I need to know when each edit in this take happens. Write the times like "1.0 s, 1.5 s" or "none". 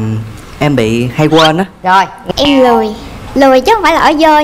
2.2 s